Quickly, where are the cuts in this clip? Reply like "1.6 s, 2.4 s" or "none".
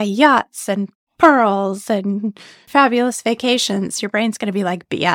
2.6 s